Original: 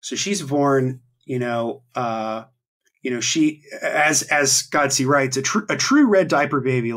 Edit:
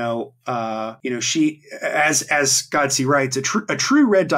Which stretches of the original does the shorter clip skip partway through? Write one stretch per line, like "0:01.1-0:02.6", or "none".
0:02.4-0:02.9